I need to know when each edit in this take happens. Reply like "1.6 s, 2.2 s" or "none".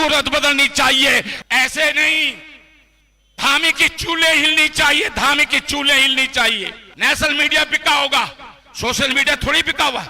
1.3 s, 6.8 s